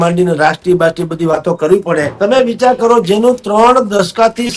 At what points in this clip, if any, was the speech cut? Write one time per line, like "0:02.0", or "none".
0:02.1